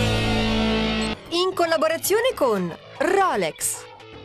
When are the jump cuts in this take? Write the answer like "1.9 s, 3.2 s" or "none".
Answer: 1.2 s